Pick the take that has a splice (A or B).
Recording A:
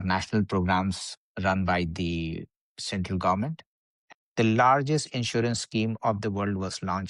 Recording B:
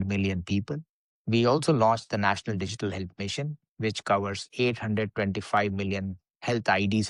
A